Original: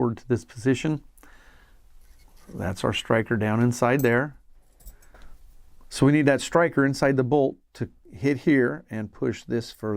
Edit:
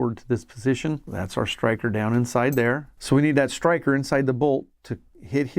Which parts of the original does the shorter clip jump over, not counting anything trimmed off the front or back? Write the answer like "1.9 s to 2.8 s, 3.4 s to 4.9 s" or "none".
1.1 s to 2.5 s, 4.4 s to 5.8 s